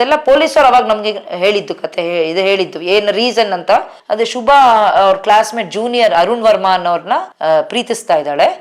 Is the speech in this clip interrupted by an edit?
yes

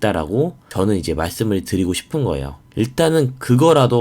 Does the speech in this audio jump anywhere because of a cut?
yes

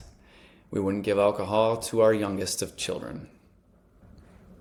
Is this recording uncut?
yes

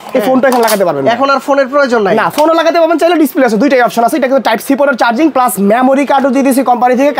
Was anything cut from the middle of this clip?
no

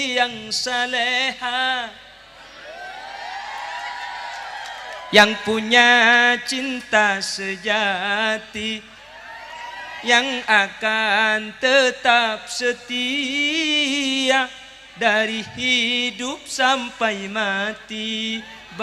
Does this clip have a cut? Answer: no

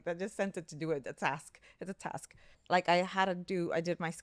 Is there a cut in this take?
yes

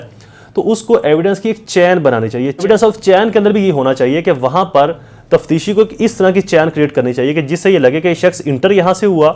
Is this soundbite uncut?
no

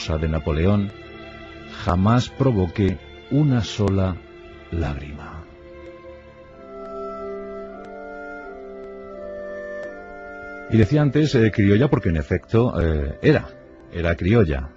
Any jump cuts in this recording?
yes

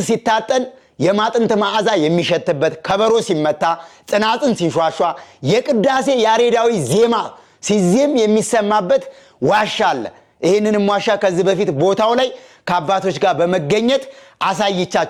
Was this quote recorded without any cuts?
yes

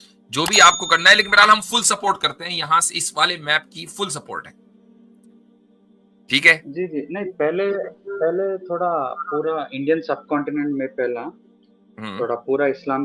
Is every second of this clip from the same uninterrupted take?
yes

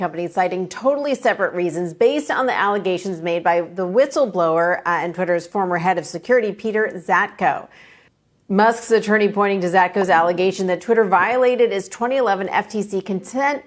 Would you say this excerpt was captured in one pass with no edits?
yes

